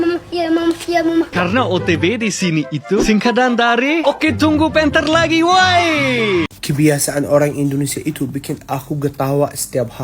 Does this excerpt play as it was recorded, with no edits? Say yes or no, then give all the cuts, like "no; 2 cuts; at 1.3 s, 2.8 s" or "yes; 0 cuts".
no; 2 cuts; at 1.3 s, 6.4 s